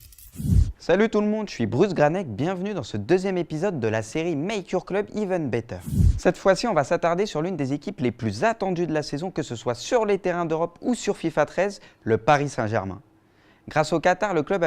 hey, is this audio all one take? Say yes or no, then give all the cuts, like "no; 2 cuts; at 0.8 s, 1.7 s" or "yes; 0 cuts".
no; 1 cut; at 10.1 s